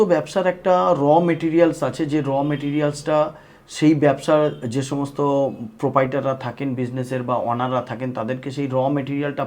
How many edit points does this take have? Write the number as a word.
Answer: zero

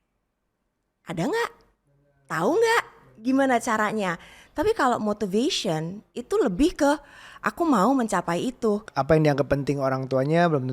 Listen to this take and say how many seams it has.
one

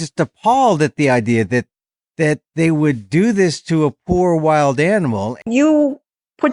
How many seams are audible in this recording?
one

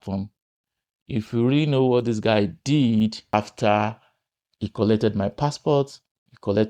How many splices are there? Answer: one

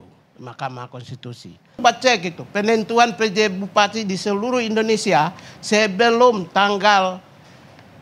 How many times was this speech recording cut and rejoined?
one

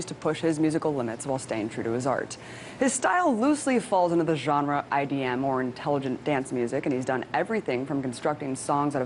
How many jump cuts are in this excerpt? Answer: one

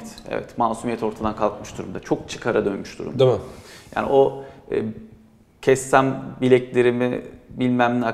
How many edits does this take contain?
zero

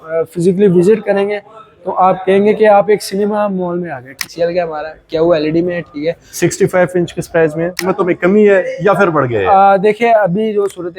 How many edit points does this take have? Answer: two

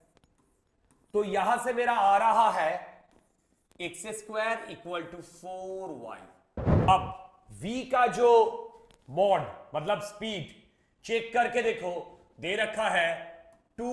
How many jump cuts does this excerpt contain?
one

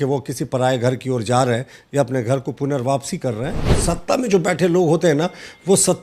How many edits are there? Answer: one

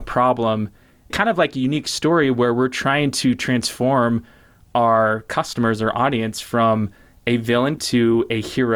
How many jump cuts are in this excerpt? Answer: two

